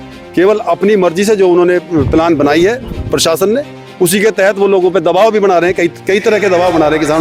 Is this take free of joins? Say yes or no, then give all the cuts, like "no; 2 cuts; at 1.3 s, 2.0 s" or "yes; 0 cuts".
yes; 0 cuts